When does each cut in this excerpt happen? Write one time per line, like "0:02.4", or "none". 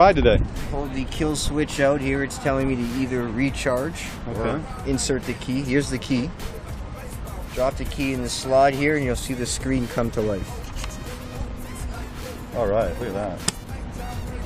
none